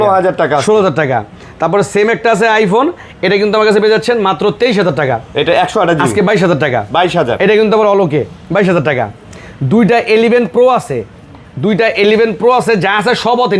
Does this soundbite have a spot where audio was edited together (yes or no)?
no